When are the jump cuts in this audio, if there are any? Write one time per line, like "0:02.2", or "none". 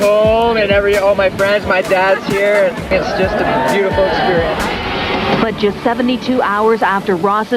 0:02.8
0:05.0